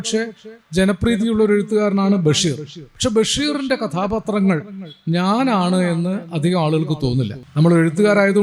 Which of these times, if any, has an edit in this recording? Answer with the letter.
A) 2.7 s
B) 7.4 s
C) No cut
B